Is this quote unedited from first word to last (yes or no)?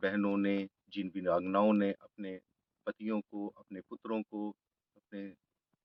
yes